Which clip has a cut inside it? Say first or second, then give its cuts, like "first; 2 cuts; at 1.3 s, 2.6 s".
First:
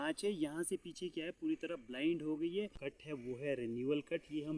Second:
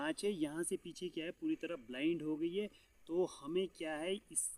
first; 1 cut; at 3.0 s